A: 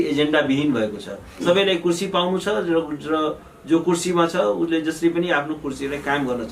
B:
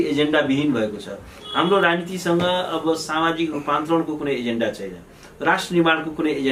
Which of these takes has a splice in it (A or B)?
A